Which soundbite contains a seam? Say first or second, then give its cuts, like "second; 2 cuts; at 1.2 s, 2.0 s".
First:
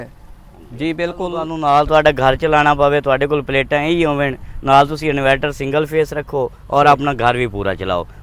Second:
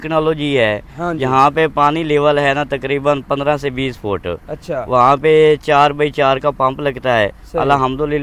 first; 1 cut; at 1.5 s